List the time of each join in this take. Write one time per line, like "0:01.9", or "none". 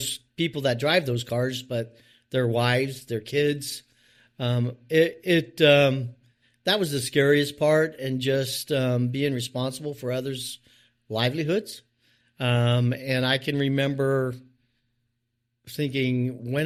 none

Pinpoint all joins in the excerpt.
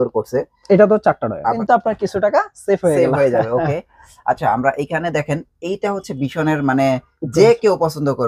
0:01.6

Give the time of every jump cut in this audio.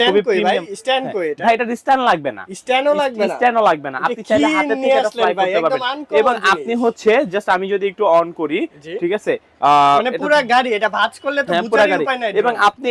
none

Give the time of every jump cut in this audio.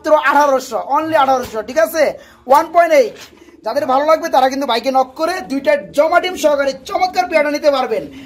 none

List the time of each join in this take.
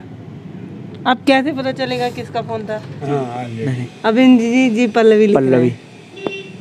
0:02.9

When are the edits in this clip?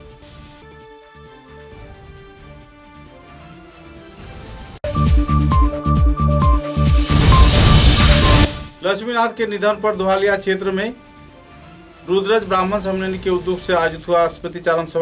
none

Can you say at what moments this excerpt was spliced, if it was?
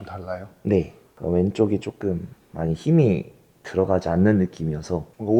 0:01.0

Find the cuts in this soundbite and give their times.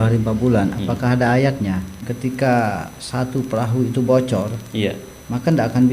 0:02.0

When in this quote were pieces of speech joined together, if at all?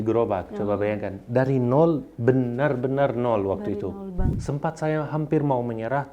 0:04.3

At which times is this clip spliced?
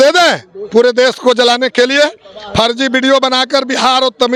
none

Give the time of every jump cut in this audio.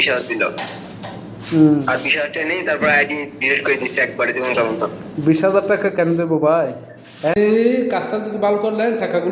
0:07.3

